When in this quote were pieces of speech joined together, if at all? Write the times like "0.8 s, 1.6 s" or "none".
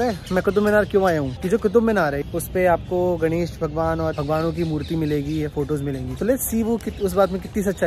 1.4 s, 2.2 s, 4.1 s, 6.1 s